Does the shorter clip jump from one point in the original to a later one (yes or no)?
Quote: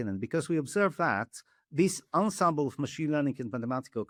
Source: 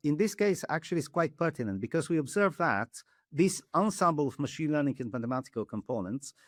no